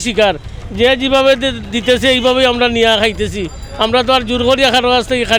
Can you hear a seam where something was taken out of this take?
no; 0 cuts

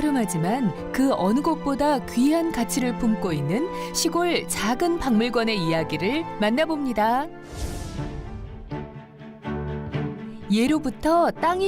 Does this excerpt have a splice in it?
no; 0 cuts

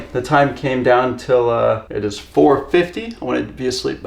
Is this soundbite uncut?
no; 1 cut; at 1.9 s

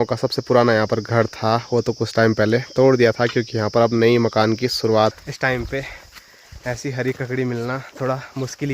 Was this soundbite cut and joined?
yes; 1 cut; at 5.2 s

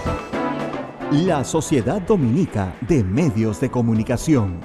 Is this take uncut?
no; 1 cut; at 0.9 s

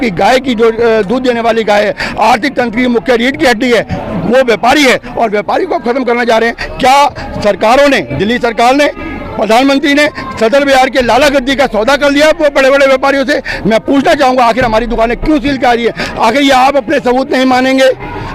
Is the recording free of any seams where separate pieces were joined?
yes; 0 cuts

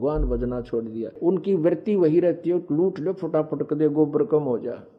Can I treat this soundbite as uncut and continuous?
no; 1 cut; at 1.2 s

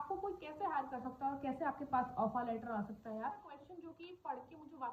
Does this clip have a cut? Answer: yes; 1 cut; at 3.5 s

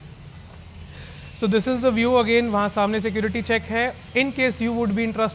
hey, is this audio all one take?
yes; 0 cuts

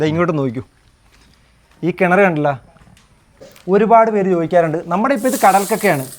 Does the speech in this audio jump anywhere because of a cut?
yes; 1 cut; at 3.5 s

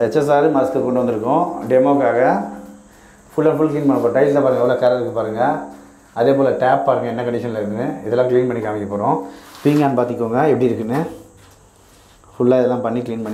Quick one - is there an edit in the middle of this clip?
no; 0 cuts

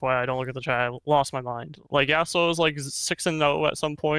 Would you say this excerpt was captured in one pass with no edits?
no; 1 cut; at 1.8 s

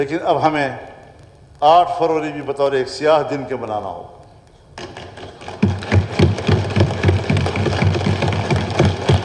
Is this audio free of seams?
yes; 0 cuts

